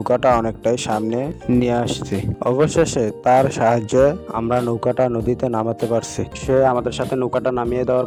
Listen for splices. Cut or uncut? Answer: uncut